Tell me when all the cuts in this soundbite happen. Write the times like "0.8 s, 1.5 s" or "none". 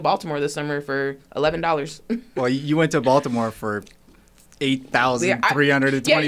2.3 s